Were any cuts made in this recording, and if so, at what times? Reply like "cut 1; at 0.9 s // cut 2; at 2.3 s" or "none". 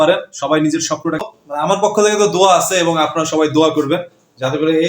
cut 1; at 1.3 s